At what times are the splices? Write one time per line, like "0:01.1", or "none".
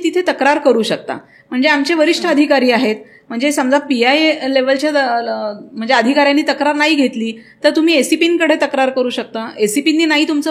none